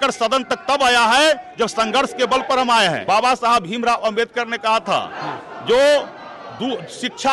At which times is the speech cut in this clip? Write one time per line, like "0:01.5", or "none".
0:03.0